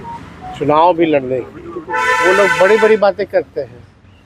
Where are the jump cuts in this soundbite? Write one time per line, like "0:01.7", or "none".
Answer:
none